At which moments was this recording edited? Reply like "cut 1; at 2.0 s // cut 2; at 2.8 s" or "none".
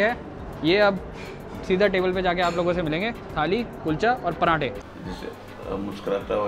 cut 1; at 4.9 s